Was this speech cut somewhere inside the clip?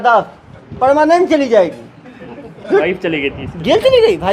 yes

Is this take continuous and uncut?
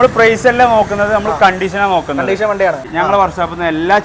no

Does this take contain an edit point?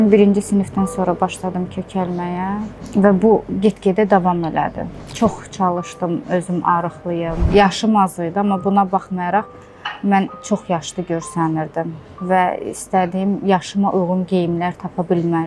yes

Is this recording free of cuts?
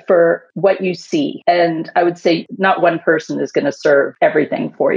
no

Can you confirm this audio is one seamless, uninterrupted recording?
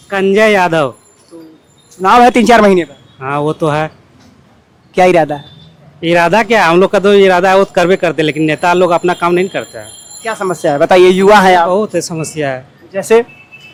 yes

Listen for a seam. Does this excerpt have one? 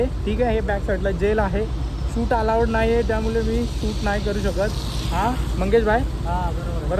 no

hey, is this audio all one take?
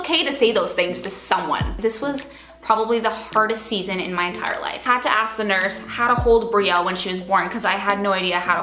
no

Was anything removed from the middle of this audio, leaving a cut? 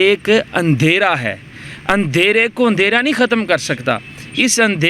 no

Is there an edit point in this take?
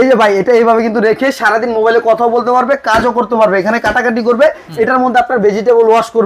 no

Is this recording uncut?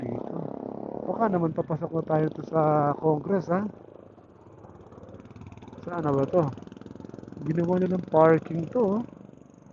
yes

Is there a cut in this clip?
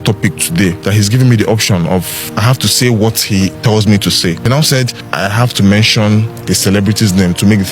yes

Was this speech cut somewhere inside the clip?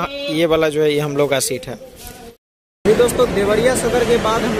yes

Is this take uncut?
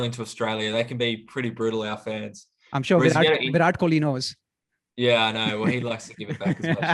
yes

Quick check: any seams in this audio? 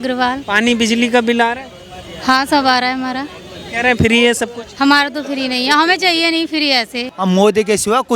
yes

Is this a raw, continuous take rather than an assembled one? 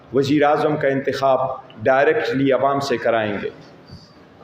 yes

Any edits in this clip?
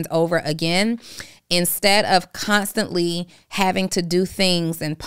no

